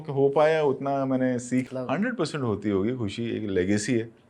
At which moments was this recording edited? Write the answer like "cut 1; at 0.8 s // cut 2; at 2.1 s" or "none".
cut 1; at 1.7 s